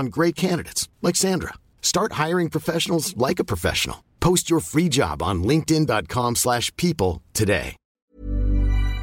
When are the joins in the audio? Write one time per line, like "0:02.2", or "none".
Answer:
0:07.9

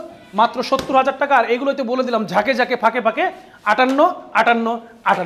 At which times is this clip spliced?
none

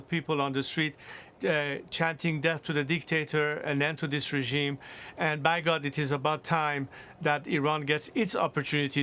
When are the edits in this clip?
none

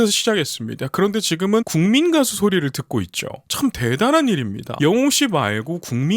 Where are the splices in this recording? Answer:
0:01.7
0:04.6

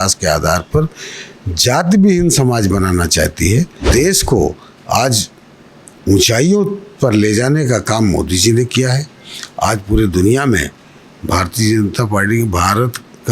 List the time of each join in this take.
0:03.9

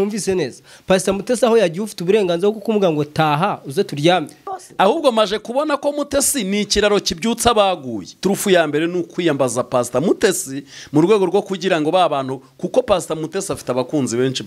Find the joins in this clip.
0:04.5
0:08.1

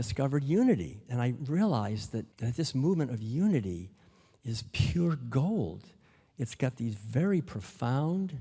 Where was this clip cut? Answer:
0:02.4

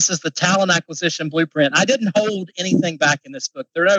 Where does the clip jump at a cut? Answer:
none

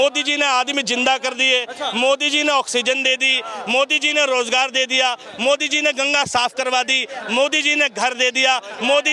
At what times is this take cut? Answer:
none

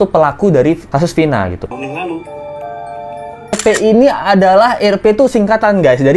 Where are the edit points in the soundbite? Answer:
0:01.7
0:03.6

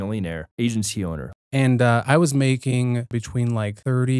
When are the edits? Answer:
0:01.2
0:03.4

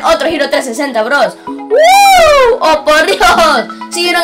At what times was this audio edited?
none

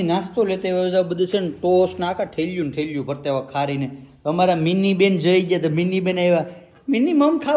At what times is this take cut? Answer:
none

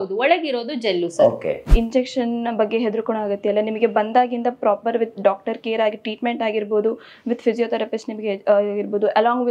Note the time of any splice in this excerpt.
0:01.7

